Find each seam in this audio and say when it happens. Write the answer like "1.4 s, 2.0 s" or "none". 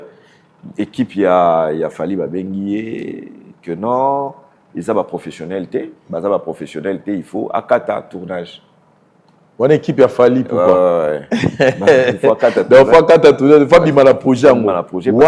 none